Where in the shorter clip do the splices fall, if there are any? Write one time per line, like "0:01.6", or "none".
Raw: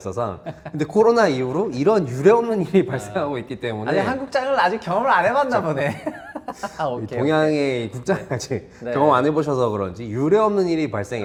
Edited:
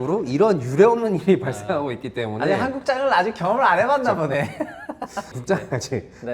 0:05.3